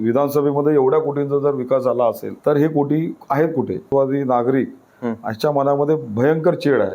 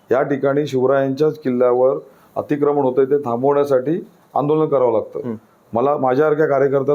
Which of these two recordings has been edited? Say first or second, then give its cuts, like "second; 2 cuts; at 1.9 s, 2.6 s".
first; 2 cuts; at 2.3 s, 3.9 s